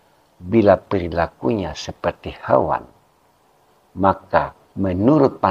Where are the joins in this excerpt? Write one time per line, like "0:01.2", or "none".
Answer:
none